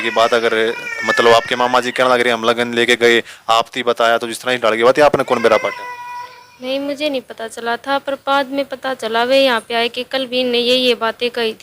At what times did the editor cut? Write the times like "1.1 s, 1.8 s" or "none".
none